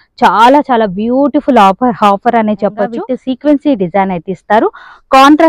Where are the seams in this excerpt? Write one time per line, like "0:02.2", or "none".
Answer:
0:03.0

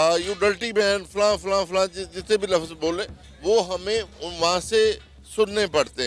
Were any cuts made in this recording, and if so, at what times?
none

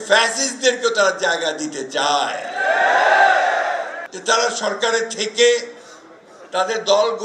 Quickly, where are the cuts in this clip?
0:04.0

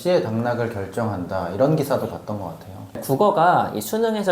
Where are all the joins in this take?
0:02.9

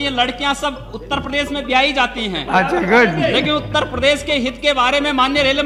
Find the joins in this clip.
none

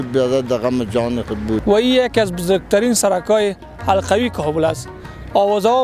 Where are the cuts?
0:01.6

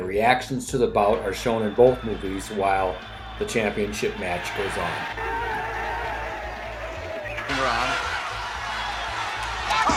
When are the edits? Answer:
none

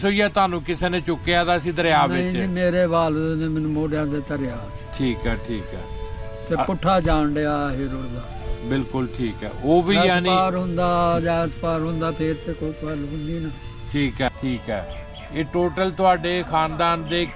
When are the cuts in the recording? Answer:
0:14.3

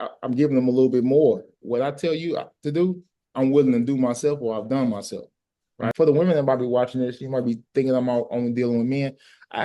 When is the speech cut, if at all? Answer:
0:01.6
0:05.9

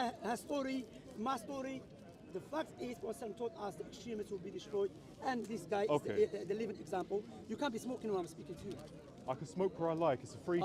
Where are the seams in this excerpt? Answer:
none

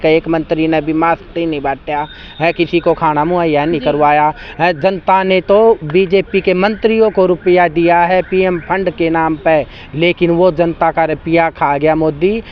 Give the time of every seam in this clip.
none

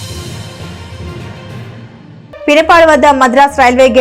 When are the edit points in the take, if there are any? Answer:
0:02.2

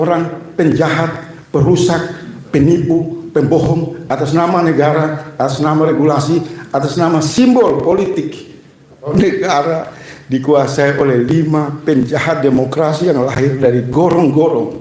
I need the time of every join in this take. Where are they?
0:09.1

